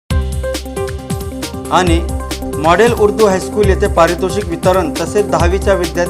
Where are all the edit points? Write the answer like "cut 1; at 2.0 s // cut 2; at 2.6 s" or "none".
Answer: none